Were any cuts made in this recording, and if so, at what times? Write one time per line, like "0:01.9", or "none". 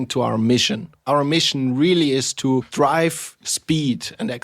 0:01.0
0:02.7